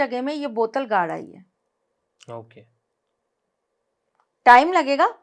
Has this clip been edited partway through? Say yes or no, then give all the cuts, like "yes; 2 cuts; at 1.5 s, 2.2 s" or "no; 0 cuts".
no; 0 cuts